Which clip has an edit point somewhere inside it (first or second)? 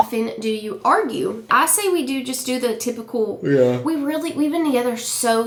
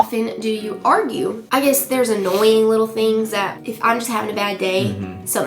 second